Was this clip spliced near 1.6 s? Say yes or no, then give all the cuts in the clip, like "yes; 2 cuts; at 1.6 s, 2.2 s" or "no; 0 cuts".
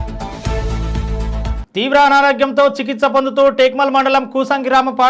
yes; 1 cut; at 1.6 s